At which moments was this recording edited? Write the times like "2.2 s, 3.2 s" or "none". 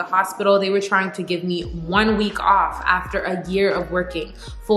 none